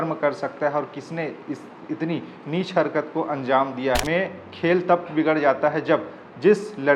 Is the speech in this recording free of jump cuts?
no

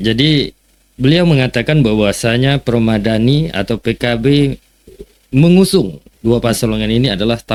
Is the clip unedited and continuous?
yes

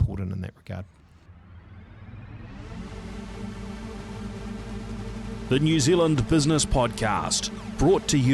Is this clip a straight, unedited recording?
no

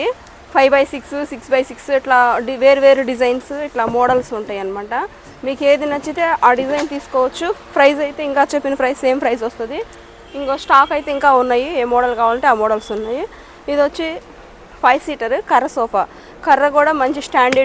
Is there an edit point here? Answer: no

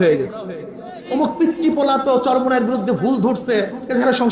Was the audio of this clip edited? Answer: yes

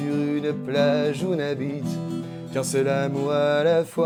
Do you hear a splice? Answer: no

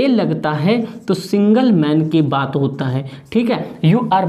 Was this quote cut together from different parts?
no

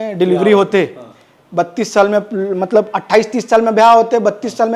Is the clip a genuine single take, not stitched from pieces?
yes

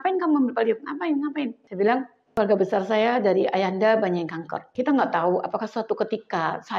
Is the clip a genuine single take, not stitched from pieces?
no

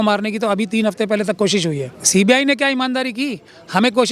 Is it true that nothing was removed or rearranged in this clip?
no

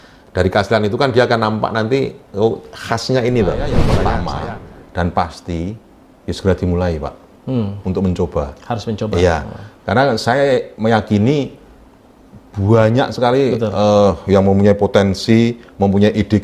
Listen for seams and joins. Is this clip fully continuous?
no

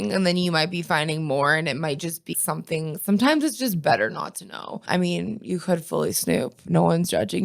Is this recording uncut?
no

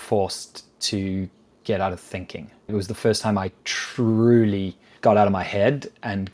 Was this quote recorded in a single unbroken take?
no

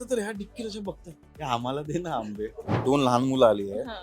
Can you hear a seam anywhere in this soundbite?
yes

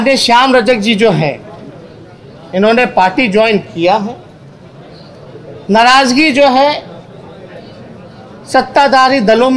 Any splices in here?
no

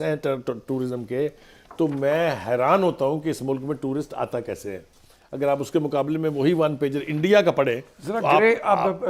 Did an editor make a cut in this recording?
no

